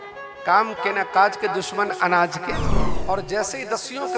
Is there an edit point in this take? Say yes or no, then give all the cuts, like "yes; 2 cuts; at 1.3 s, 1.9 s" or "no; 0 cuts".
yes; 1 cut; at 2.9 s